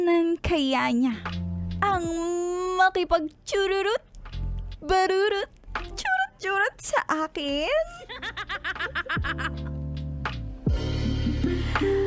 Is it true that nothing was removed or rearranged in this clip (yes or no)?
yes